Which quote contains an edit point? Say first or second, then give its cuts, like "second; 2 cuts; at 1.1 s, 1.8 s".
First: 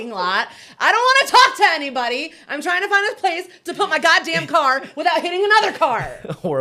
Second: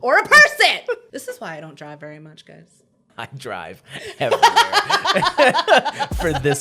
second; 2 cuts; at 1.0 s, 3.1 s